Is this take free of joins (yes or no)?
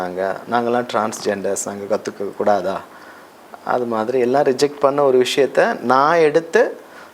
yes